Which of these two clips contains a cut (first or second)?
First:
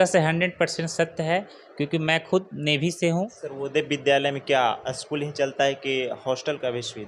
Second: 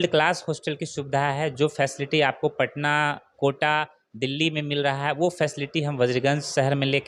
first